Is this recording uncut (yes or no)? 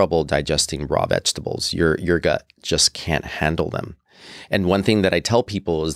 yes